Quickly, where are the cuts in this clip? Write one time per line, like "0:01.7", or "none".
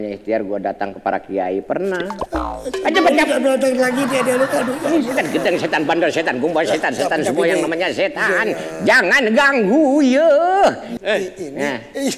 0:10.9